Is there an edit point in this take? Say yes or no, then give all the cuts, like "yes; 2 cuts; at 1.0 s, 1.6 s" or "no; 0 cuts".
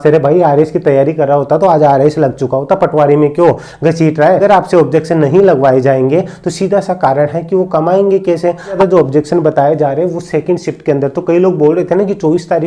yes; 2 cuts; at 4.4 s, 8.8 s